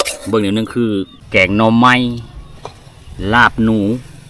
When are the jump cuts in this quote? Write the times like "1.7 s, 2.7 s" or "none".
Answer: 1.2 s